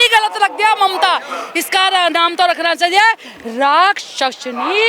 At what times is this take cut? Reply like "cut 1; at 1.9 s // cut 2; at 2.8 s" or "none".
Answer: none